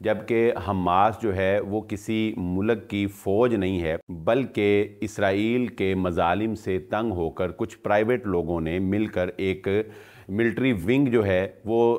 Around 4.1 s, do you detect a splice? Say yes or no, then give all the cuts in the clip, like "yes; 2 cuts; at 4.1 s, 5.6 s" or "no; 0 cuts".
yes; 1 cut; at 4.1 s